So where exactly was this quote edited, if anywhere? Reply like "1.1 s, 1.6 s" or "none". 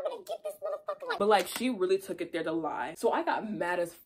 1.2 s